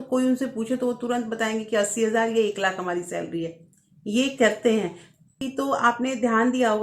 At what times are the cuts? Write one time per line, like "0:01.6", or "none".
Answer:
0:05.4